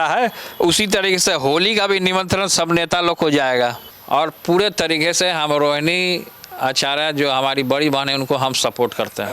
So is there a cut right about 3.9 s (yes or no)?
yes